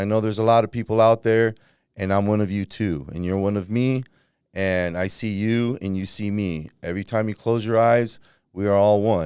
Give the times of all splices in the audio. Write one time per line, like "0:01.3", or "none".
none